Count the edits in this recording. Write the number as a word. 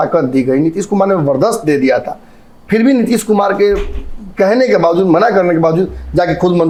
zero